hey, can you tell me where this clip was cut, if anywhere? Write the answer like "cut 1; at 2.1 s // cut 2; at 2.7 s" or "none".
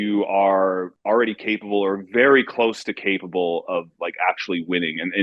cut 1; at 0.9 s